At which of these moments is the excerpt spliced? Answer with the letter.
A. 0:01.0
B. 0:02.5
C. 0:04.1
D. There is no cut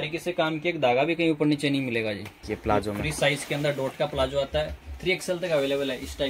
B